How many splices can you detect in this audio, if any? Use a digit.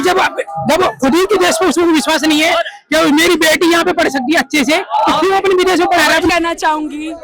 1